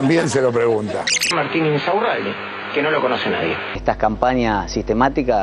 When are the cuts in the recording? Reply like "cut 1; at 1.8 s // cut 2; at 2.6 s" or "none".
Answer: cut 1; at 3.7 s

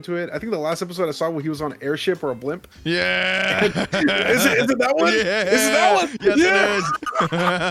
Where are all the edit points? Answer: none

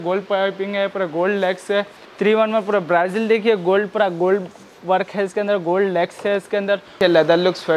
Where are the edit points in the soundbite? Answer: cut 1; at 2.0 s // cut 2; at 7.0 s

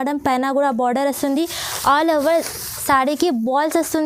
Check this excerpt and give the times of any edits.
none

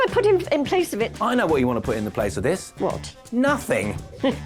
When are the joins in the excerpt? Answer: none

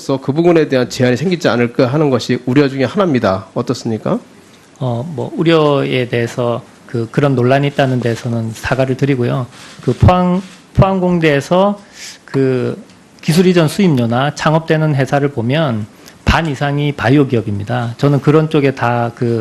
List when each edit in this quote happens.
cut 1; at 14.1 s

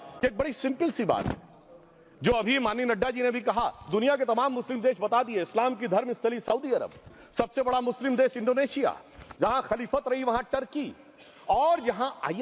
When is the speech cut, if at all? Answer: none

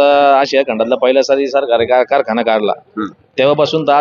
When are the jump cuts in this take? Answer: none

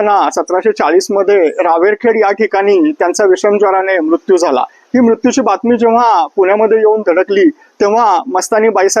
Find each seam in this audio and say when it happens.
none

